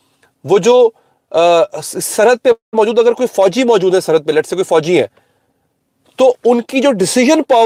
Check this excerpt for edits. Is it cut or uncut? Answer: uncut